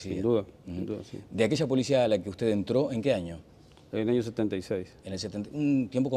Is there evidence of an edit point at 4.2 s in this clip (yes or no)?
yes